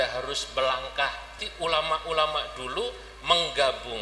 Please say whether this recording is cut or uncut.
cut